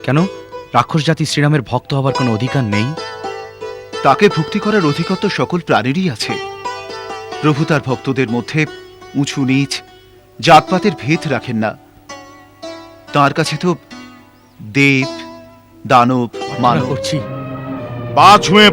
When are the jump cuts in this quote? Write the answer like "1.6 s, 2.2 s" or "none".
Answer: 16.8 s